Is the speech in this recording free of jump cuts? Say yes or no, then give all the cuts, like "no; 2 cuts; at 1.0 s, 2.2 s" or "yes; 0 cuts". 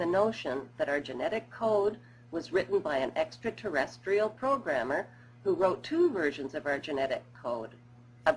yes; 0 cuts